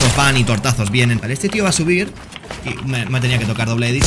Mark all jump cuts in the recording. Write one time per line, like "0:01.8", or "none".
0:01.2